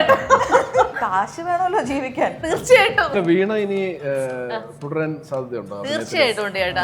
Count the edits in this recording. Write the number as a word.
two